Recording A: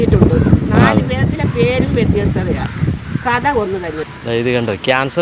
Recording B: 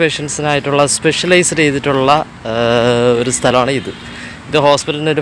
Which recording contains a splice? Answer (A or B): A